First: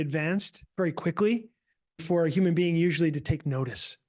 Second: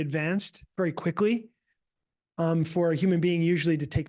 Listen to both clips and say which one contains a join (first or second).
first